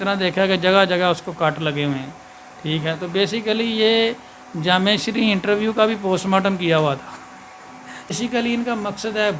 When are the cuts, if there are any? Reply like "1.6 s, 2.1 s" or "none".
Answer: 8.1 s